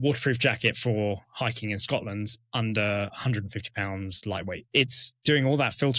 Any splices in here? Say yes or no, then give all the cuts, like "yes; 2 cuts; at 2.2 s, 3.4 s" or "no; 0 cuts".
yes; 1 cut; at 4.7 s